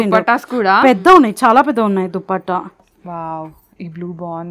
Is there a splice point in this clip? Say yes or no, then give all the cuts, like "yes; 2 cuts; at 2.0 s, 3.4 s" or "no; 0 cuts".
yes; 1 cut; at 2.9 s